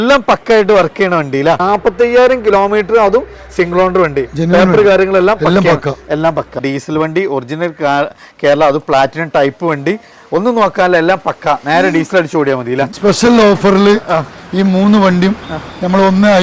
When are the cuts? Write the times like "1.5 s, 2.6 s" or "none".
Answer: 1.6 s, 6.6 s, 12.9 s